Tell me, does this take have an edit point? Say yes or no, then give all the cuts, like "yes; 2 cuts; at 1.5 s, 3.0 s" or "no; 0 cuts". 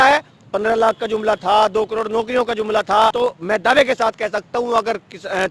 yes; 1 cut; at 3.1 s